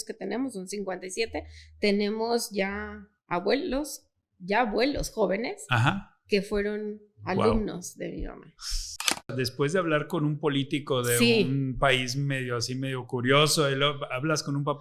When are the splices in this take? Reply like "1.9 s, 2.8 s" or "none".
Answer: 9.3 s